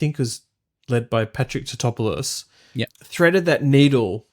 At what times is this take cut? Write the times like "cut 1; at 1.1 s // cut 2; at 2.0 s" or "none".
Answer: cut 1; at 2.9 s